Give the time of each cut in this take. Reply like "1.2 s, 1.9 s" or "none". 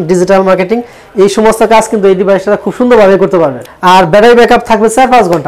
3.7 s

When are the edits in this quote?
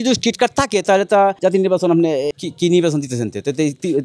1.4 s, 2.3 s

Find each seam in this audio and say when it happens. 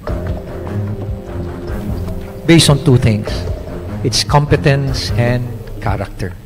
2.4 s

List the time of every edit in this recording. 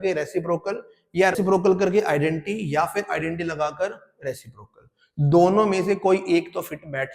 1.3 s

